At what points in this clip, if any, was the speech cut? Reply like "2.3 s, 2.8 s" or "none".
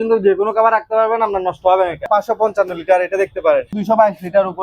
2.1 s, 3.8 s